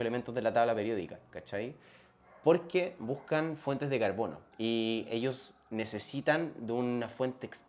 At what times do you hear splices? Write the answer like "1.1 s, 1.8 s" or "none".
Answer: 4.4 s